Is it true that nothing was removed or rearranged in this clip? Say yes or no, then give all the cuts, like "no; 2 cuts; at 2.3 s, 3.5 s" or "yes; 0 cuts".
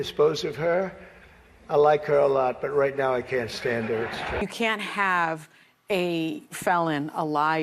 no; 1 cut; at 4.4 s